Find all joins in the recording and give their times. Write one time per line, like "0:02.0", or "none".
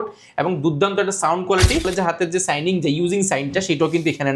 0:01.9